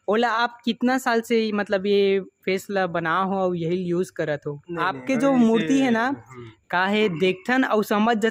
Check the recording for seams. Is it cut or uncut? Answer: uncut